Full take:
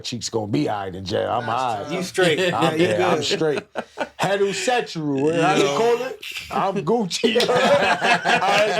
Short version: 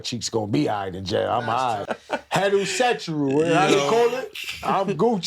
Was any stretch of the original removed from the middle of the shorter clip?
yes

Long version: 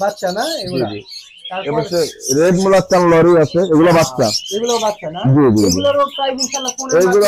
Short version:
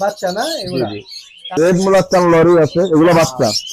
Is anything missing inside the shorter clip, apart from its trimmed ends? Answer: yes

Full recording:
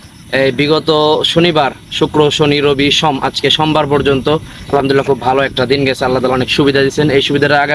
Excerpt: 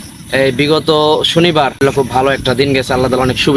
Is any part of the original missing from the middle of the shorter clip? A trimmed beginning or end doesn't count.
yes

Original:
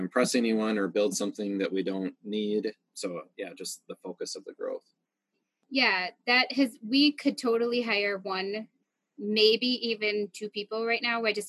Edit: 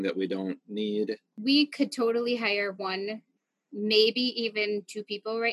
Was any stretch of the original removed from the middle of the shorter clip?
yes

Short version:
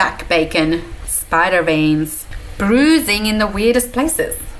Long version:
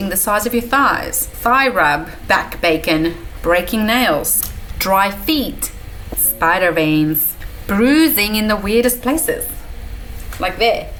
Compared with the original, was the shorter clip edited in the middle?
yes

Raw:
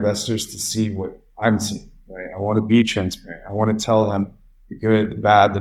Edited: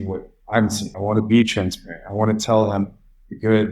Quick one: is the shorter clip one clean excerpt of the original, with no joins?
no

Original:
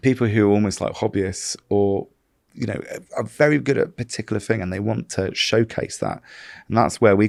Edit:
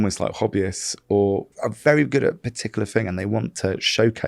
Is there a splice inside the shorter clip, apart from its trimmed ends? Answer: yes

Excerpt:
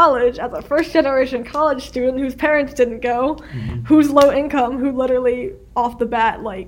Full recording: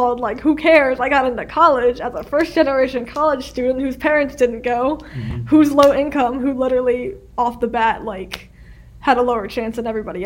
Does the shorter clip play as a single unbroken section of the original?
yes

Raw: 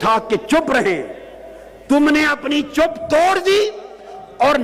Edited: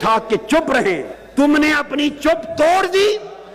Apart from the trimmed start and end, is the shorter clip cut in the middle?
yes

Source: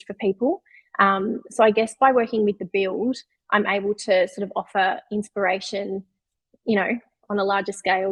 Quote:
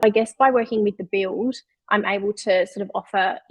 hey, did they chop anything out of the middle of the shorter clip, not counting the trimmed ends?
no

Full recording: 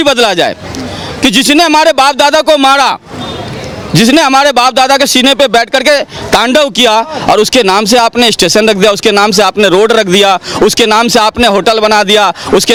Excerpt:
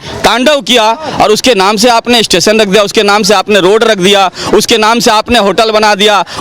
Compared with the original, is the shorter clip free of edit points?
yes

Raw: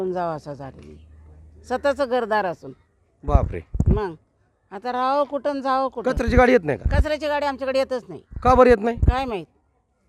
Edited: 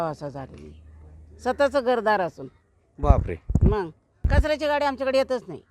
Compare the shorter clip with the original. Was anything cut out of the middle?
yes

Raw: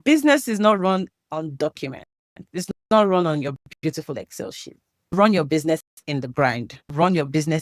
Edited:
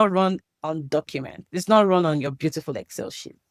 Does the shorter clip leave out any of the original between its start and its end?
yes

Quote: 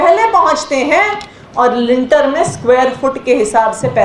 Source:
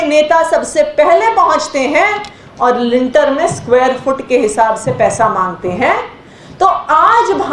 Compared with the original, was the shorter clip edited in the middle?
no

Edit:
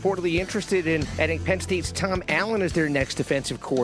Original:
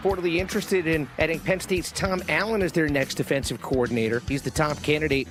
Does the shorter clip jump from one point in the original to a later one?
no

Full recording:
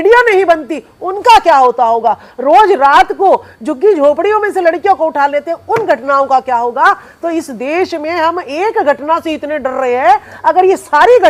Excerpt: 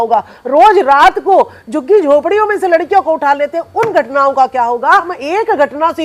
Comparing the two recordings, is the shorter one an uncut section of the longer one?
no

